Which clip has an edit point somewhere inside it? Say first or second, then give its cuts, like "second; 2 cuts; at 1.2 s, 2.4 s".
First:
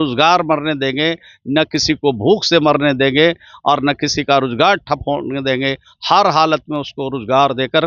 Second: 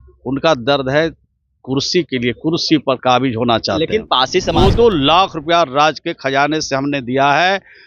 second; 1 cut; at 4.5 s